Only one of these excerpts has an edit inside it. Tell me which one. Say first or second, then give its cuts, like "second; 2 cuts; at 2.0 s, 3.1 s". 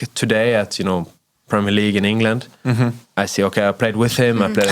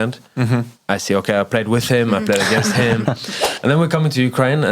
second; 1 cut; at 3.4 s